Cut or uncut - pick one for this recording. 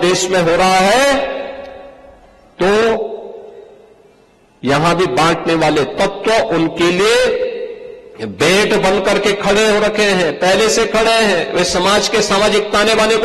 uncut